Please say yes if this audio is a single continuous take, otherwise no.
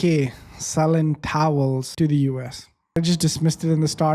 no